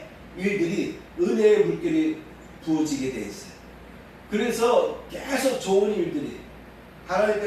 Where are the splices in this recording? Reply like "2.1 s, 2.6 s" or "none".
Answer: none